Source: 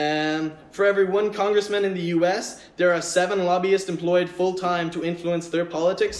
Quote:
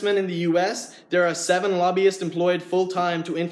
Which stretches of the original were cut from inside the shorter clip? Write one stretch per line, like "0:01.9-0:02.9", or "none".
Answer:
none